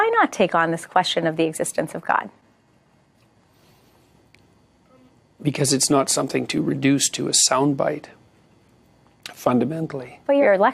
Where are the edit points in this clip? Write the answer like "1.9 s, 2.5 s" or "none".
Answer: none